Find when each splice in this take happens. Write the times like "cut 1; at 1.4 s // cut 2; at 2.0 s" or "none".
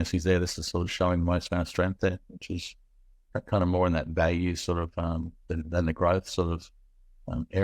none